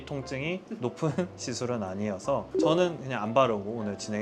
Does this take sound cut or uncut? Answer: uncut